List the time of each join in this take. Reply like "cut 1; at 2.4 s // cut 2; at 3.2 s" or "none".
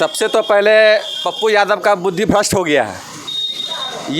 none